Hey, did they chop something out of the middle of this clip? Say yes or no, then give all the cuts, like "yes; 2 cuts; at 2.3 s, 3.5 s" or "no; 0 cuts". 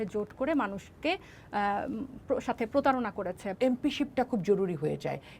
yes; 1 cut; at 3.4 s